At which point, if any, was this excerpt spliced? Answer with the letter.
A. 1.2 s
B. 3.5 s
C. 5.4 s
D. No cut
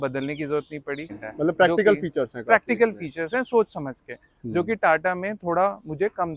A